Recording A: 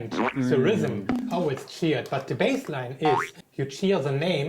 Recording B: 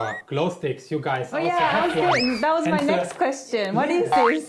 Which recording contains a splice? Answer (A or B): A